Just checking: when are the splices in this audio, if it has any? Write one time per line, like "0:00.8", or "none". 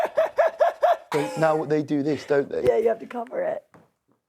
0:01.1